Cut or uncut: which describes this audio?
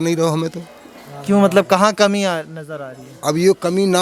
uncut